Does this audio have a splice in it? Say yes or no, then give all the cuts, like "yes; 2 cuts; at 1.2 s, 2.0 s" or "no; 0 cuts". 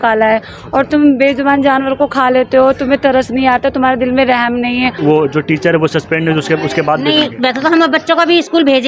yes; 1 cut; at 5.0 s